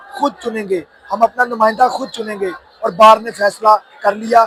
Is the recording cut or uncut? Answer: uncut